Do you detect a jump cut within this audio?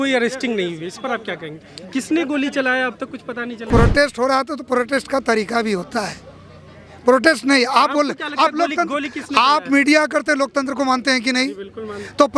yes; 1 cut; at 3.5 s

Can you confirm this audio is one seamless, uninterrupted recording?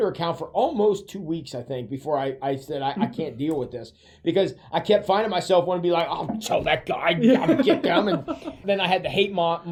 yes; 0 cuts

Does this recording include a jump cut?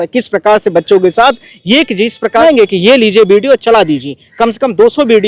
yes; 1 cut; at 2.4 s

